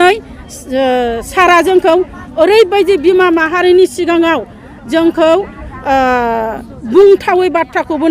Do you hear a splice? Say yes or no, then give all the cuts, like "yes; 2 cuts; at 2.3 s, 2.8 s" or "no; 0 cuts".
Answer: no; 0 cuts